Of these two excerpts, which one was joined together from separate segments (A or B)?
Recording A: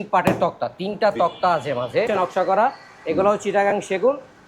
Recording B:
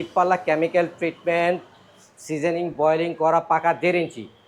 A